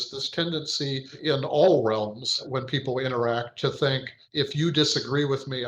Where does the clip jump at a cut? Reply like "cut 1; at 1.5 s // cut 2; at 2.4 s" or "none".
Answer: cut 1; at 1.1 s // cut 2; at 2.4 s // cut 3; at 4.2 s